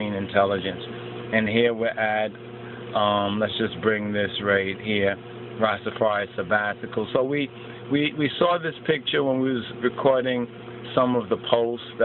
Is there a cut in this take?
yes; 1 cut; at 5.4 s

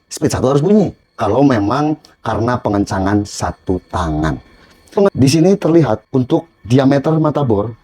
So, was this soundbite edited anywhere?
yes; 3 cuts; at 1.1 s, 5.1 s, 6.0 s

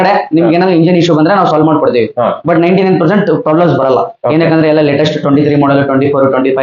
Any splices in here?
no; 0 cuts

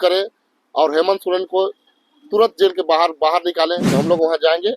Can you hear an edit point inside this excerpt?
yes; 1 cut; at 3.8 s

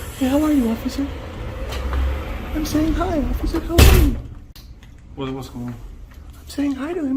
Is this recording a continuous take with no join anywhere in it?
yes; 0 cuts

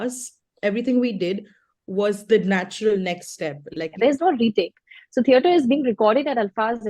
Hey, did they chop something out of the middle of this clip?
yes; 1 cut; at 3.8 s

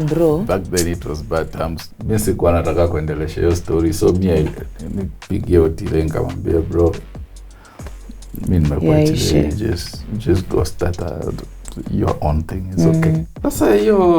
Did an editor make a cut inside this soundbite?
yes; 2 cuts; at 1.9 s, 13.3 s

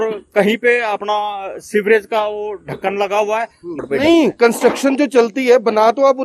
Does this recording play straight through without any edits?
no; 1 cut; at 3.8 s

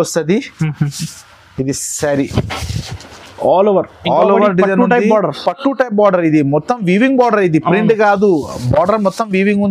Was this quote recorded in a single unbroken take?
yes; 0 cuts

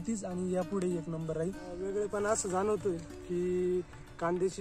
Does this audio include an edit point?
yes; 1 cut; at 1.8 s

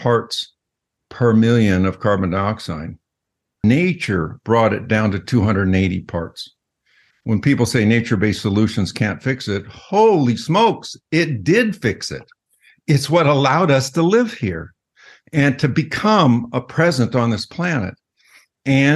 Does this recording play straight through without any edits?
no; 1 cut; at 3.6 s

